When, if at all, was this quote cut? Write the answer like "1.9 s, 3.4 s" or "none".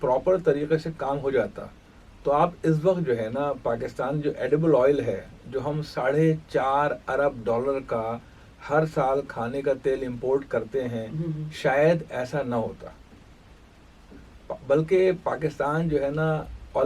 none